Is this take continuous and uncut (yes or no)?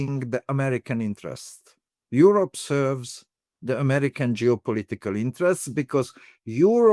yes